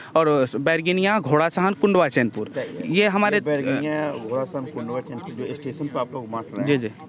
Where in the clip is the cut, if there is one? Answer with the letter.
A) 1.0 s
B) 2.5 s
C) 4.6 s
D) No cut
D